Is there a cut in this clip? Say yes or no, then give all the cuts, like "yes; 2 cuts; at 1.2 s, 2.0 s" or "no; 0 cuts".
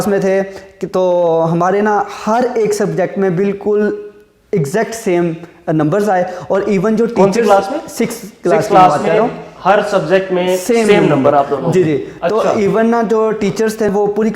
no; 0 cuts